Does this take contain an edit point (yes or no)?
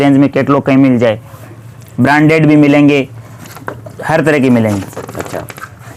no